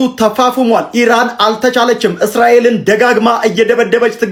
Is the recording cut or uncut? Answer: uncut